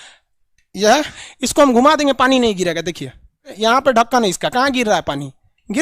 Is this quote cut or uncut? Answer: cut